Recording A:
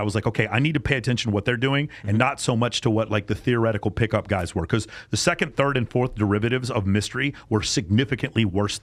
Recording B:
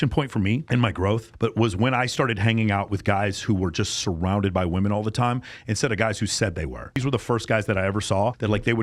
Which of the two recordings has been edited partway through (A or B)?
B